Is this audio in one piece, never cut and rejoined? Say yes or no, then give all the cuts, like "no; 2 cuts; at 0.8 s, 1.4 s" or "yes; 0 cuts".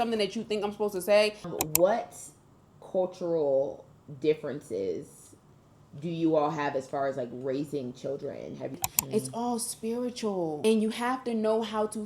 no; 3 cuts; at 1.5 s, 8.7 s, 10.6 s